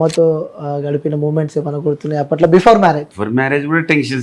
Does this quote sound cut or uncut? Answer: cut